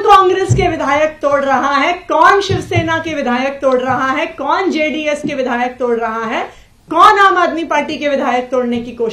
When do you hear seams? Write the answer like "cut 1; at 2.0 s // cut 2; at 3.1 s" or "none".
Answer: none